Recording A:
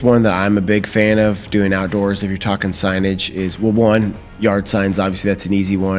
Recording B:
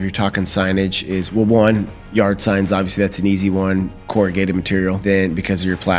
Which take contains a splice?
B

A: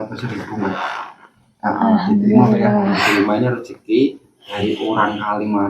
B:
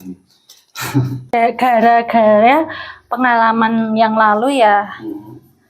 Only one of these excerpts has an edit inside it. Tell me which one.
B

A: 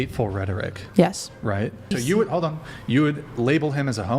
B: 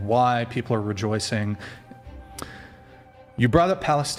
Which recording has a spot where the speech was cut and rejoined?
A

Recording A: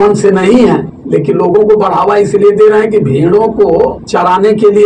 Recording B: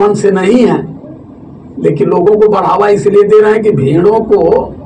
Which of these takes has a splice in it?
A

